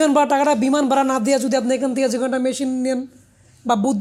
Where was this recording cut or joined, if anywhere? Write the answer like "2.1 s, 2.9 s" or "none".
none